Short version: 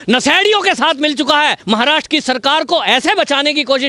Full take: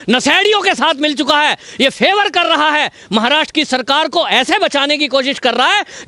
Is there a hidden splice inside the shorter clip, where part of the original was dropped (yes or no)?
yes